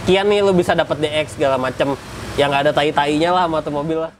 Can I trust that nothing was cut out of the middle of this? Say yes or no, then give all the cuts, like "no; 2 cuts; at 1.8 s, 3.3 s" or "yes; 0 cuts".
yes; 0 cuts